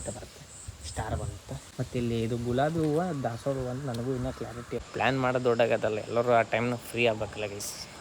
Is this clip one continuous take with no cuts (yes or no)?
no